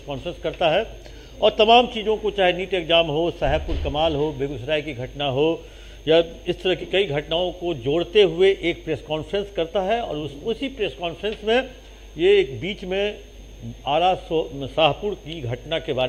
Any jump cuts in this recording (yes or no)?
no